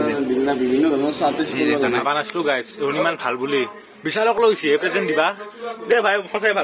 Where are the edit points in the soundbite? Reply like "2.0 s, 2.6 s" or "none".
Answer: 2.0 s